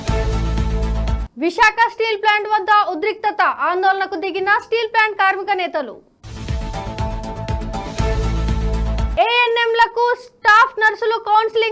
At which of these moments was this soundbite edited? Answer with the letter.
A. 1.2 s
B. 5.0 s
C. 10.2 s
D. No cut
A